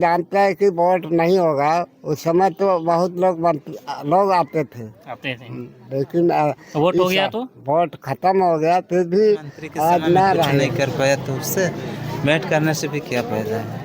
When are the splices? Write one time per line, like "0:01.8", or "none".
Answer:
0:10.7